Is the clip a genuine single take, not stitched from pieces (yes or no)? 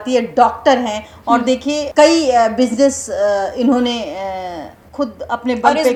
yes